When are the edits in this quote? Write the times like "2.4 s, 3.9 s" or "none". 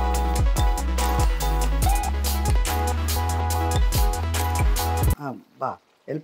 5.2 s